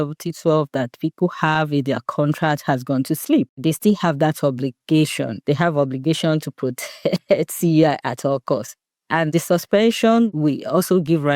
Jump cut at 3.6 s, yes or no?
yes